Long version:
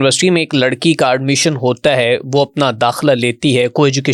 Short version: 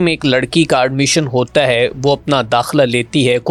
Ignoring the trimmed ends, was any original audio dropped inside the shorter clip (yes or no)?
no